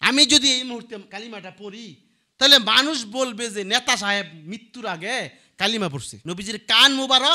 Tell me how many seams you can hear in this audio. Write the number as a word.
two